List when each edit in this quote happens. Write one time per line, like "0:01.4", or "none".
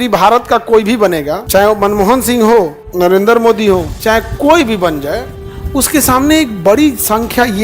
0:01.4
0:02.8
0:03.9